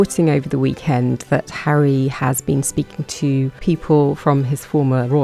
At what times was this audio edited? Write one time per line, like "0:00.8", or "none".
0:03.6